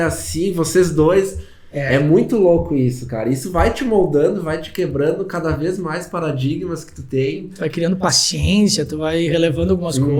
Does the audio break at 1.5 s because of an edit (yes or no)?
no